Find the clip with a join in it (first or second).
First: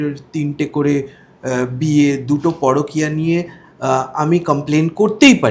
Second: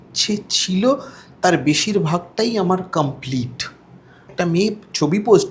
second